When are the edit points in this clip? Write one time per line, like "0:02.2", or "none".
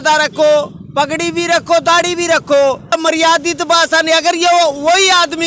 0:03.0